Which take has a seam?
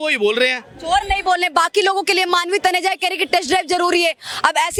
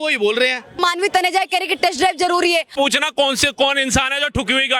second; 2 cuts; at 0.8 s, 2.7 s

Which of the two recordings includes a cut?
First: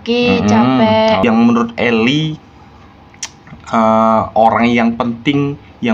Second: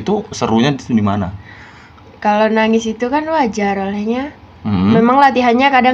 first; 1 cut; at 1.2 s

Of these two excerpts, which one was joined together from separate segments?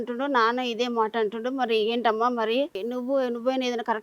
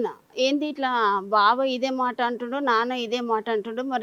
first; 1 cut; at 2.8 s

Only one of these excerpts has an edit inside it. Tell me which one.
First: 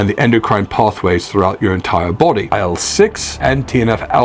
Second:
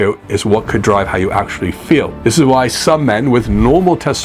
first; 1 cut; at 2.5 s

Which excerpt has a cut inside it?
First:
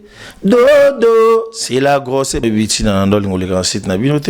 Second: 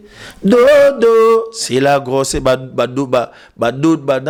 first; 1 cut; at 2.4 s

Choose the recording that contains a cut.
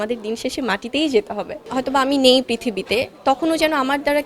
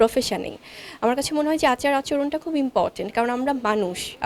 first; 1 cut; at 1.6 s

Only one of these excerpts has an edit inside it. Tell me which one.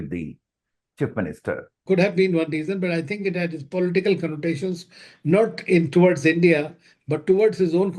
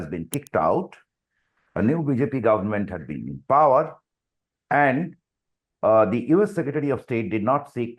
first; 1 cut; at 1.8 s

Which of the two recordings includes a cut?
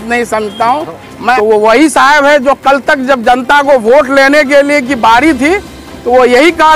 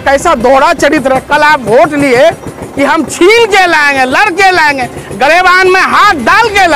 first; 1 cut; at 1.4 s

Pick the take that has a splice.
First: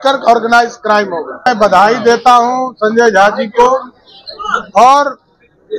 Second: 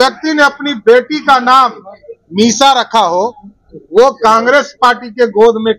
first; 1 cut; at 1.5 s

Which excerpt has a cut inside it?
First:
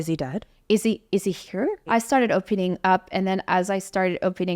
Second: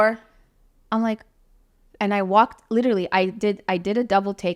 first; 1 cut; at 1.9 s

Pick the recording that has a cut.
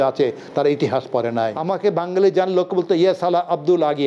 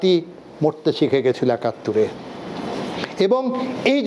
first; 1 cut; at 1.6 s

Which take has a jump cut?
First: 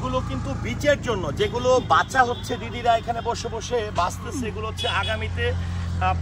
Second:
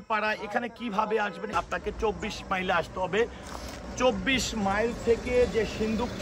second; 1 cut; at 1.5 s

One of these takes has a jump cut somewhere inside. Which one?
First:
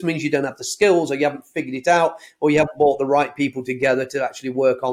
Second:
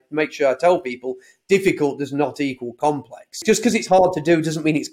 second; 1 cut; at 3.4 s

